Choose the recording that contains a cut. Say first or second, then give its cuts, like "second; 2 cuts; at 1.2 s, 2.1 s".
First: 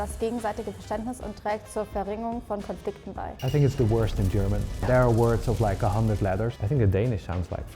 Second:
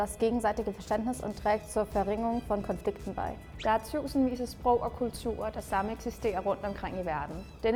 first; 2 cuts; at 3.4 s, 6.6 s